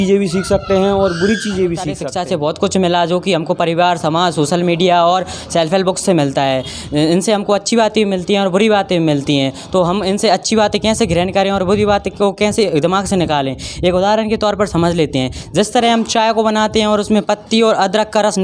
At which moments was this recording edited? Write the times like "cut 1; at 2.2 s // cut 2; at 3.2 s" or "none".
cut 1; at 2.0 s